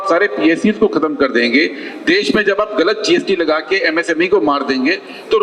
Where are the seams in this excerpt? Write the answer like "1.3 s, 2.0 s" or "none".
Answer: none